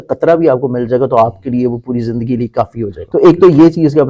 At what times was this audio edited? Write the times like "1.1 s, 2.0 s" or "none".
3.0 s